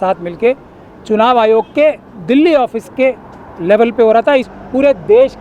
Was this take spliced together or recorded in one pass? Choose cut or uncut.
cut